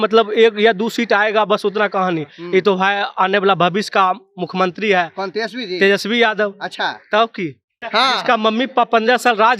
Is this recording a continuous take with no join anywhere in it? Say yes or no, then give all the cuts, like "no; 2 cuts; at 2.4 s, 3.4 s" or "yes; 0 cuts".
no; 1 cut; at 7.8 s